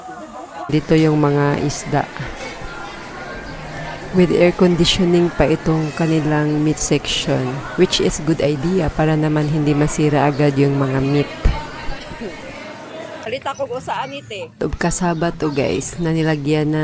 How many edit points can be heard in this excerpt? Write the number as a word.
two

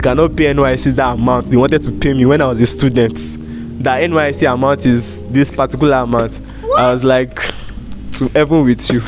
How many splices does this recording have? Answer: zero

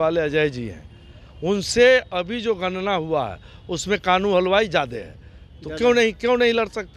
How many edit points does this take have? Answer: zero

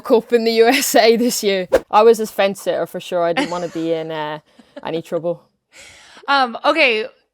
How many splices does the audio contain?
one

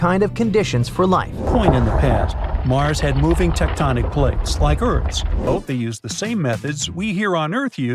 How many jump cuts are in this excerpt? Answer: two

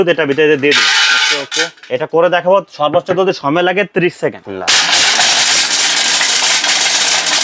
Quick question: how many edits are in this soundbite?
one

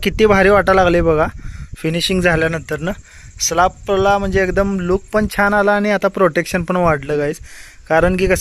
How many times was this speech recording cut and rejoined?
zero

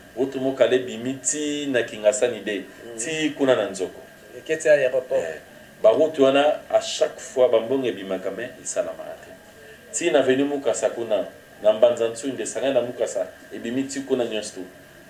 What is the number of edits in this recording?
zero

